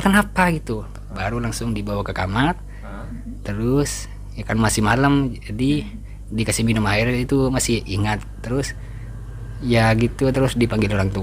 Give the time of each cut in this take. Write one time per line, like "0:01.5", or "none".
none